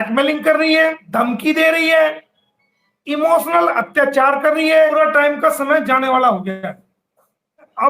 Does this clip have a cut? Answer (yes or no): yes